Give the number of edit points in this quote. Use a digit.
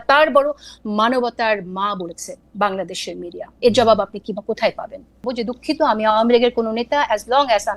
1